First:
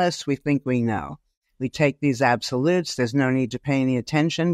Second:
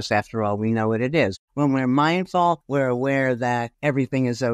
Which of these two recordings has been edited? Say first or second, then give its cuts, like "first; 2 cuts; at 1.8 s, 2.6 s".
second; 3 cuts; at 1.3 s, 2.6 s, 3.7 s